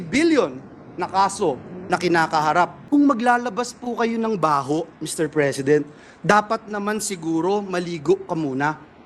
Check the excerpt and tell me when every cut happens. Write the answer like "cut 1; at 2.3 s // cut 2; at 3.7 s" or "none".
cut 1; at 2.8 s